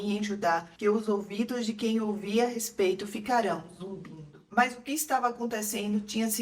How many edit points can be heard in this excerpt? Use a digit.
1